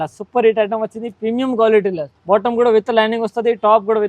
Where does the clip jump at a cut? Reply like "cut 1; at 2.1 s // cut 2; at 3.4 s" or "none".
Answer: cut 1; at 2.1 s